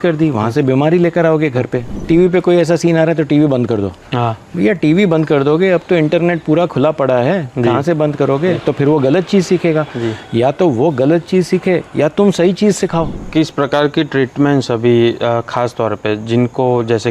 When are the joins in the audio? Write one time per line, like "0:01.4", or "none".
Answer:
0:01.9
0:13.2